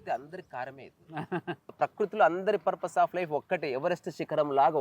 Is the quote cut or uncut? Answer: cut